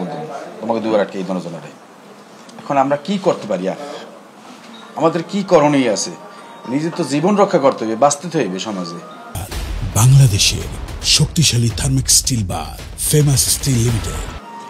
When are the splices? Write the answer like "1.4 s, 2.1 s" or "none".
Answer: none